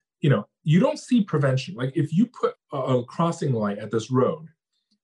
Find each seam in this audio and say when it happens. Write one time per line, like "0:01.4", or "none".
0:02.6